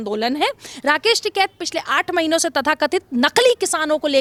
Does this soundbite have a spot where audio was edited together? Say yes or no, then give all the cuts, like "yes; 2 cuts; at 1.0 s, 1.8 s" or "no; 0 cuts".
no; 0 cuts